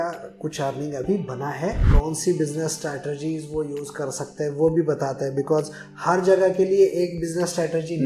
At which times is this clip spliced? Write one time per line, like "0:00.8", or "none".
0:01.8